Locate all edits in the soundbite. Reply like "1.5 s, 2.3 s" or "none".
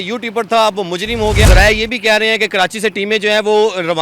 1.4 s